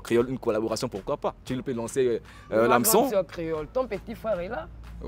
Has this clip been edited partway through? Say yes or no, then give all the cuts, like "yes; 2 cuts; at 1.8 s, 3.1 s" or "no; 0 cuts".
no; 0 cuts